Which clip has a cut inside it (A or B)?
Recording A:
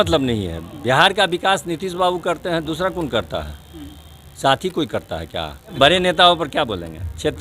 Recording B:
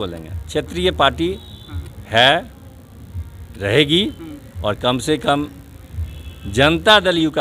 A